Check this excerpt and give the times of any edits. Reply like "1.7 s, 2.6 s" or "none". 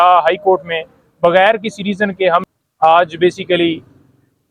2.4 s

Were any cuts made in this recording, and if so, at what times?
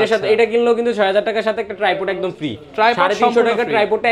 none

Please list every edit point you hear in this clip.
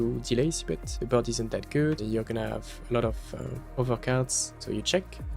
0.9 s, 2.0 s, 3.6 s, 4.5 s

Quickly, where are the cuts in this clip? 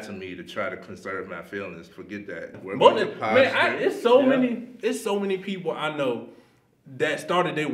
2.6 s

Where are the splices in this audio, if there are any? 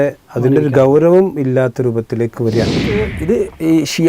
3.2 s

